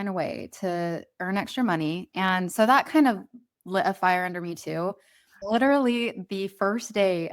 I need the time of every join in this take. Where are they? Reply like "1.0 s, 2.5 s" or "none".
5.4 s